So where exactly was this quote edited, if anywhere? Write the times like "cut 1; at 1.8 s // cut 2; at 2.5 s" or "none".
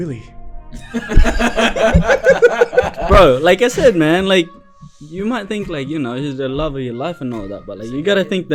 none